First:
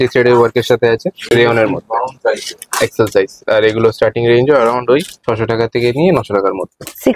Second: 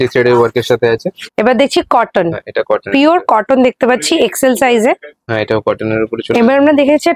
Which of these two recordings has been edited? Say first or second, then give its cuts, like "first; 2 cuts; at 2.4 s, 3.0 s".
second; 2 cuts; at 1.2 s, 5.1 s